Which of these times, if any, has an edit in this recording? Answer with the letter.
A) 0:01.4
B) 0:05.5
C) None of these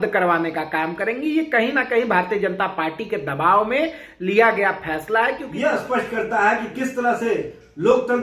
B